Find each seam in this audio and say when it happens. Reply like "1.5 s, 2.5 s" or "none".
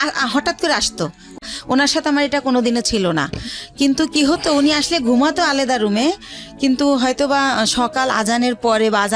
1.4 s